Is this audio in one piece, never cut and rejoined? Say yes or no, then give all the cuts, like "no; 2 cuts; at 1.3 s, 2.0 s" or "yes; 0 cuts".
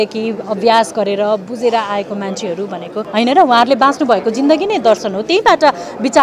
no; 1 cut; at 2.9 s